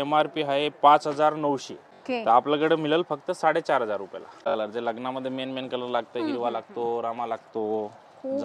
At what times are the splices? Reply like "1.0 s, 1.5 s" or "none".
1.9 s, 4.5 s

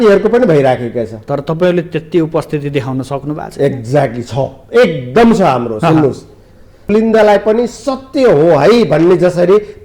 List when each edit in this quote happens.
6.9 s

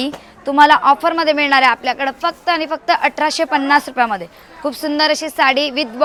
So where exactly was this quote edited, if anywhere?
none

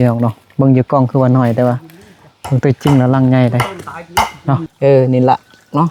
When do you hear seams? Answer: 4.7 s

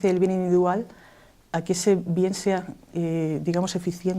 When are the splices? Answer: 3.1 s

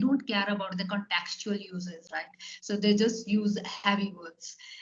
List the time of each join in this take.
none

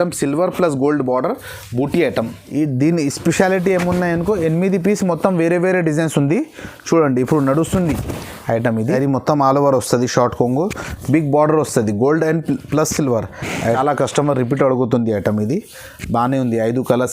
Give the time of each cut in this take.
2.4 s, 8.8 s, 13.6 s

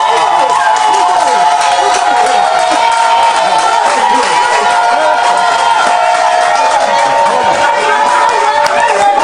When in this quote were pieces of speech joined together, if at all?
none

